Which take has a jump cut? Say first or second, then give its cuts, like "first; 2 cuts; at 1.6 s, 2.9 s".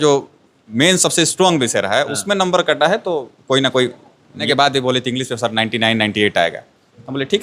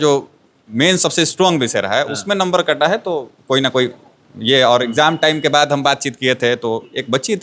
first; 1 cut; at 4.4 s